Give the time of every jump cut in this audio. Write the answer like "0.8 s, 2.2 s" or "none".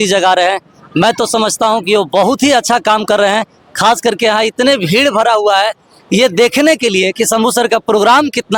none